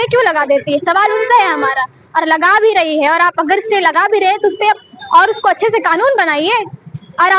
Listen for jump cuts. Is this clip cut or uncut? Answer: uncut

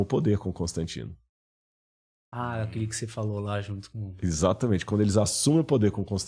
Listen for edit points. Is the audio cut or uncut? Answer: uncut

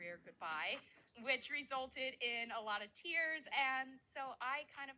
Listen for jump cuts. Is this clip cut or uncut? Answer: cut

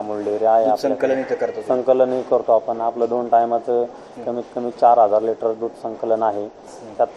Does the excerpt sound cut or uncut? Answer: uncut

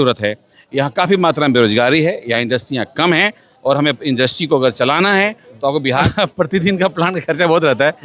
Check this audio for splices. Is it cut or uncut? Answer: cut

